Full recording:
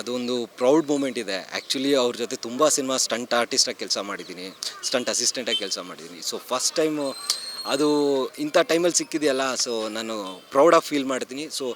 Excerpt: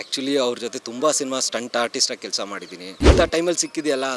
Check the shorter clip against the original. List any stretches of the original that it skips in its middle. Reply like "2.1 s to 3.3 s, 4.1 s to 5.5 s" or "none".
4.5 s to 8.3 s

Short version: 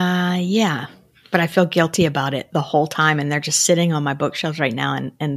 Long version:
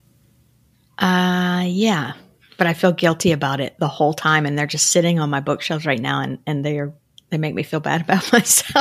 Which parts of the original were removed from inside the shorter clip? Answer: none

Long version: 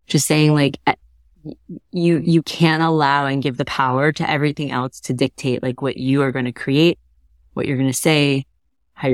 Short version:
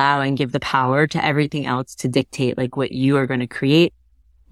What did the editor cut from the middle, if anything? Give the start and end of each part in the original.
none

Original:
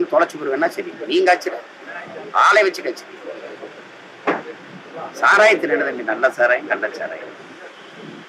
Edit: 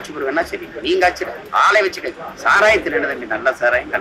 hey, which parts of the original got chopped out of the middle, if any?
1.6 s to 2.2 s, 3.1 s to 5.0 s

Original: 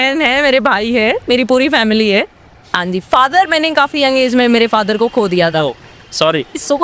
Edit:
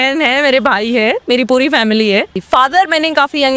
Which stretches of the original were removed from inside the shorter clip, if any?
2.4 s to 3.0 s

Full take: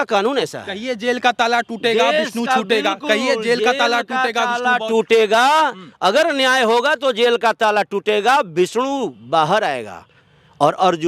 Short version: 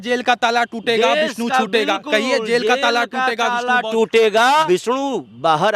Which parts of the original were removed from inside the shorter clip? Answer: 5.6 s to 8.5 s

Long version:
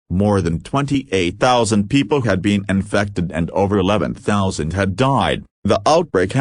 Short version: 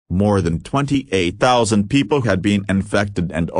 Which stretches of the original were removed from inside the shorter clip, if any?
none

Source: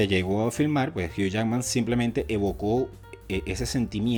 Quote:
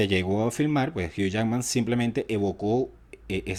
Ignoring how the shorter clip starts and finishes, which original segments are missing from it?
none

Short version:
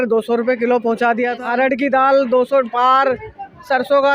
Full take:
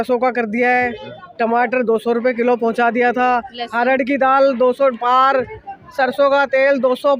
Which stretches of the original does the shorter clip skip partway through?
3.1 s to 3.6 s

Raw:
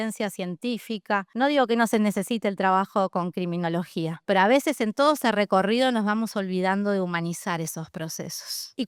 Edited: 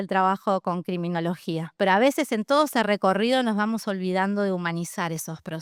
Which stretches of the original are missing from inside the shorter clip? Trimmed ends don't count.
none

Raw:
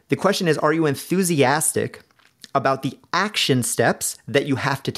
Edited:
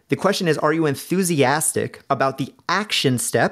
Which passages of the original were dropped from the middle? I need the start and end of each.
2.0 s to 2.4 s

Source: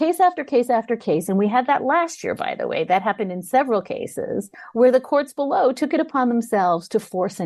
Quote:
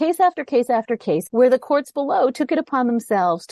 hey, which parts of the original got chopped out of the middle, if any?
1.2 s to 4.7 s

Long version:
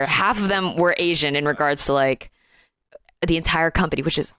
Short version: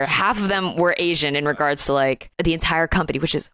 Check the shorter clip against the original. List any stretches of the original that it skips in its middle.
2.3 s to 3.1 s

